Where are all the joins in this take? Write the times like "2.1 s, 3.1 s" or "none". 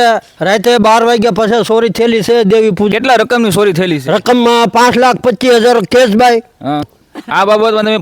2.9 s, 6.9 s